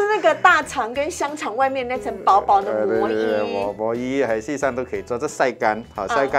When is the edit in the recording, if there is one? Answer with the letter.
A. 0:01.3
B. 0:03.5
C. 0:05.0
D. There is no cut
D